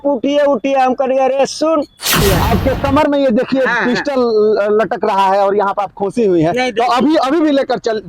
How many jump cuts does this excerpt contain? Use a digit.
1